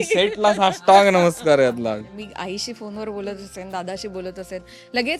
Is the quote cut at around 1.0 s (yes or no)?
no